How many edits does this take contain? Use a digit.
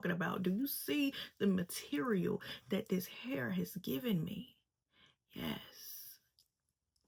0